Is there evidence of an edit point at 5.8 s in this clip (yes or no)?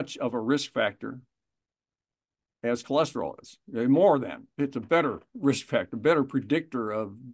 no